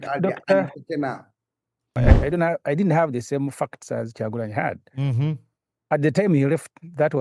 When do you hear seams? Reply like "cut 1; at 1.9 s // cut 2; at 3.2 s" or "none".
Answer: cut 1; at 1.9 s